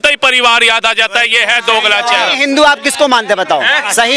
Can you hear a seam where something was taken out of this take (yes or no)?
no